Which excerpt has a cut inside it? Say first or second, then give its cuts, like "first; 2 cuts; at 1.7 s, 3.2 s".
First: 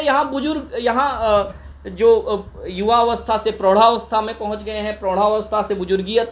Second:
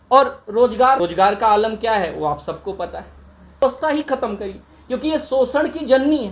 second; 2 cuts; at 1.0 s, 3.6 s